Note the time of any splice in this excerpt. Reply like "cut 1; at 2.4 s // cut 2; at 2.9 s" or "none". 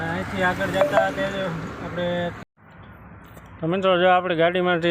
cut 1; at 2.4 s